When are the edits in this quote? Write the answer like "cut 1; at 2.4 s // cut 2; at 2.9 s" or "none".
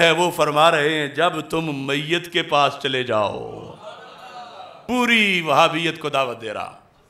cut 1; at 4.8 s